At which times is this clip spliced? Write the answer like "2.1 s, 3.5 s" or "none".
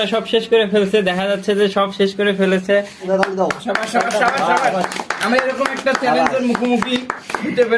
3.1 s